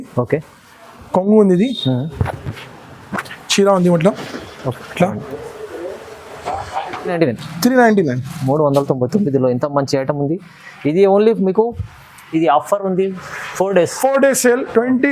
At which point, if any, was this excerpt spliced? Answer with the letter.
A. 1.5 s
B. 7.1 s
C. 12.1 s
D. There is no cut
B